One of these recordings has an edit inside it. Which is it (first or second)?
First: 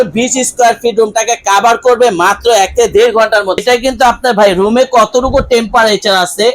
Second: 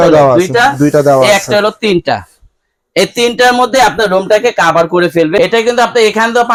first